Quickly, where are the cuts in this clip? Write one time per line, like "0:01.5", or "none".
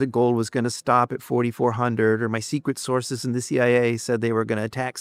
none